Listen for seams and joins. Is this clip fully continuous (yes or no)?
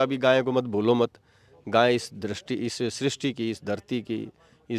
yes